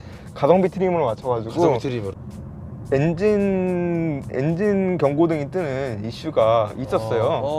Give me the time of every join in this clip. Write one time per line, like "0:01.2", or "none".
0:02.1